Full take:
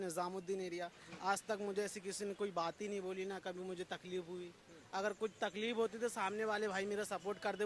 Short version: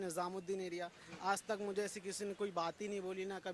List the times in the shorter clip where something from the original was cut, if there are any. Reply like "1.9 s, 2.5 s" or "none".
none